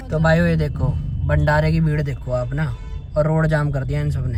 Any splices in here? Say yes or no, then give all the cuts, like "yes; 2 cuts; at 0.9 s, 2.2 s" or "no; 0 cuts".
no; 0 cuts